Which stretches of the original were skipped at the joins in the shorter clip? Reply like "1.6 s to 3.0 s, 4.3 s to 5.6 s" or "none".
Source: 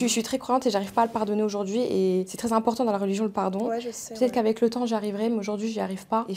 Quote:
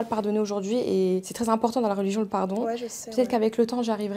none